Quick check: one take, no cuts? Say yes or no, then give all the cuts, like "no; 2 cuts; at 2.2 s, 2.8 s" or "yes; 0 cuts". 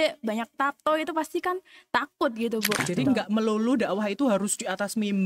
no; 1 cut; at 2.8 s